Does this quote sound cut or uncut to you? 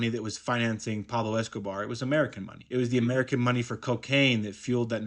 uncut